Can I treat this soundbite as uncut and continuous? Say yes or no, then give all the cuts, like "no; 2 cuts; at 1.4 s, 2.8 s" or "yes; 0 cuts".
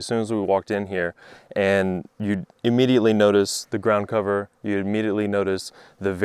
yes; 0 cuts